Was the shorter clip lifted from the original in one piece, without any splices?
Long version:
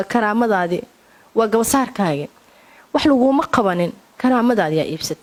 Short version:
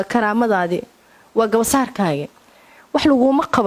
yes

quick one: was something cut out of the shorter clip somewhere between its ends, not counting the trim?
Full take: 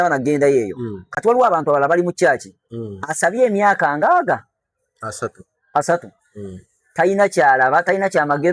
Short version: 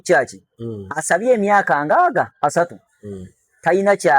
yes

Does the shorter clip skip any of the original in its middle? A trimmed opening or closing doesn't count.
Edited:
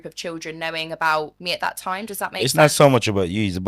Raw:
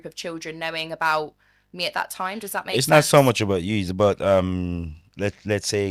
yes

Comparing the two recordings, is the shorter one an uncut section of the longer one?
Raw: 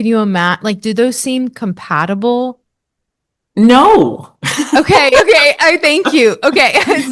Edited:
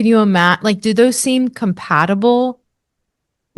yes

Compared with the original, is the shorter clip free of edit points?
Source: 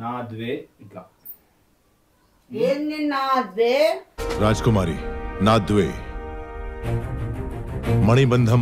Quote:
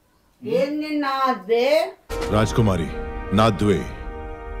yes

